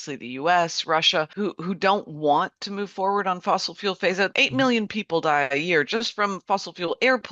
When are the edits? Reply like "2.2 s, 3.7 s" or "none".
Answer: 1.3 s, 4.3 s